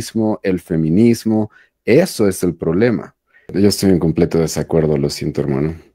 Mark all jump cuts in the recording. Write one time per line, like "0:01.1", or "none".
0:03.5